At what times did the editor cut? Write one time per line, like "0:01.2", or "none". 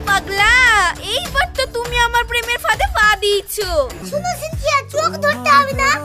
0:04.0